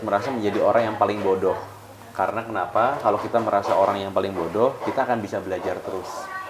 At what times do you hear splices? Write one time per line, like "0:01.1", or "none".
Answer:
none